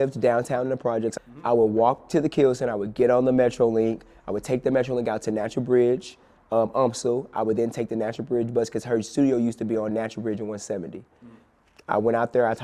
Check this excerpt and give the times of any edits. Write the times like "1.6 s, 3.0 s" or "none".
1.2 s